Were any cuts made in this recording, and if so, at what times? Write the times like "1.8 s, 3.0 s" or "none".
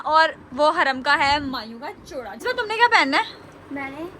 2.4 s

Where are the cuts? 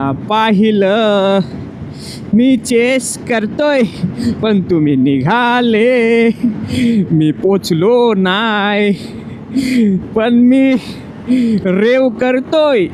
none

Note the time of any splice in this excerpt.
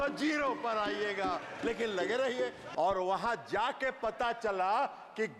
2.6 s

